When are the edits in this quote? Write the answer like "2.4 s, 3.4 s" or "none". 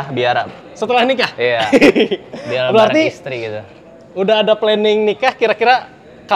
none